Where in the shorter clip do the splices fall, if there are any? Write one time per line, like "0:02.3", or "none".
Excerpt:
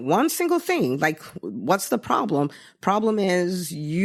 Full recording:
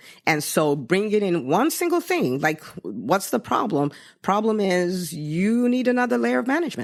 none